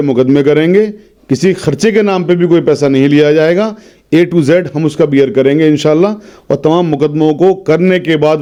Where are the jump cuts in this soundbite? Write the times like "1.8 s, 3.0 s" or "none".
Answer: none

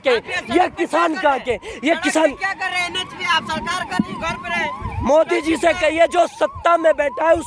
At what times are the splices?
none

